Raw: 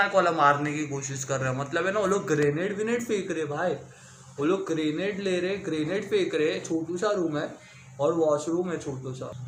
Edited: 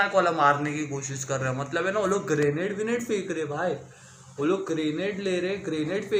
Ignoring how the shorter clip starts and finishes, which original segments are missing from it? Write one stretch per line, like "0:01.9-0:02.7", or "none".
none